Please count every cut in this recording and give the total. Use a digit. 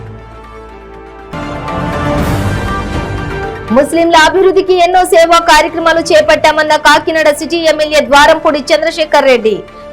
2